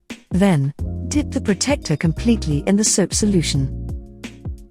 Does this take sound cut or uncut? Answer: cut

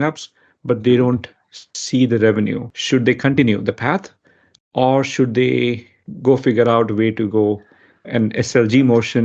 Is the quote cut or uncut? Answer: cut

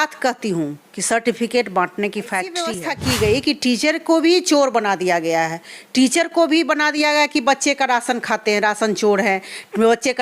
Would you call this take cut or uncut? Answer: cut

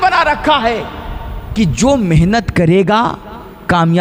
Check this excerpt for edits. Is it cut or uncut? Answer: uncut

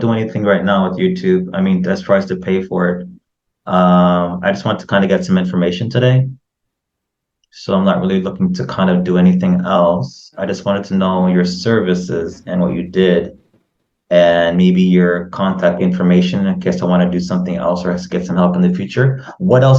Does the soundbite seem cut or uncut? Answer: uncut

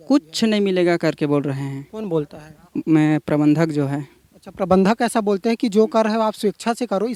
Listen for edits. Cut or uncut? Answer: uncut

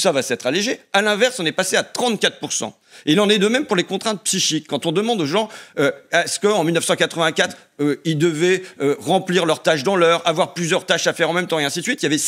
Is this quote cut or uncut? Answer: uncut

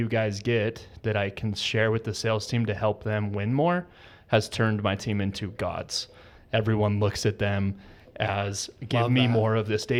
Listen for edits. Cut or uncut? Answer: uncut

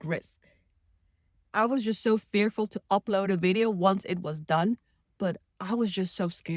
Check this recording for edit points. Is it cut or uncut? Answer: cut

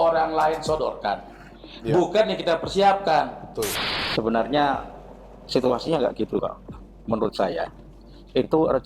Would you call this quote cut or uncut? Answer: cut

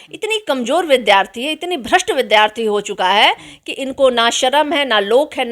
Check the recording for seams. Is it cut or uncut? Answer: uncut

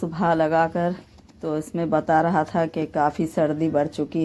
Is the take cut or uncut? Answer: uncut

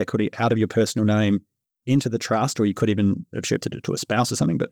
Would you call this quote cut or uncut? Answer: uncut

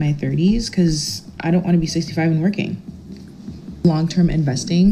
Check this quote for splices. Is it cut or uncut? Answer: uncut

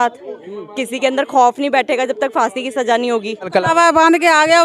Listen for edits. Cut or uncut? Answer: cut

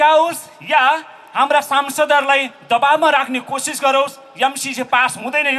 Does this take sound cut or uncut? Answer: uncut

